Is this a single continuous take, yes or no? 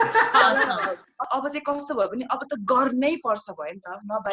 no